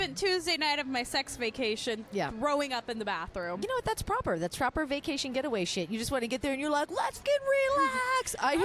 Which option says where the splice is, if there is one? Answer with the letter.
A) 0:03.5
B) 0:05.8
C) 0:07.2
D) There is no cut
C